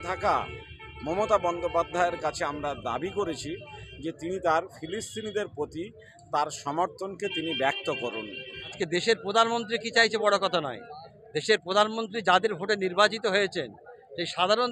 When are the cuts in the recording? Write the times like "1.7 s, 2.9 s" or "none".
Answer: 8.7 s